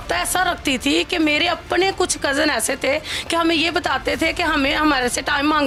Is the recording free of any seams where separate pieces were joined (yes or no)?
yes